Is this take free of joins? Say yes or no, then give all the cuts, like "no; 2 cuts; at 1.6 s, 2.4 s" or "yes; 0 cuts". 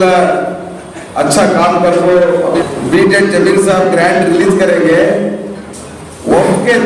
no; 1 cut; at 2.6 s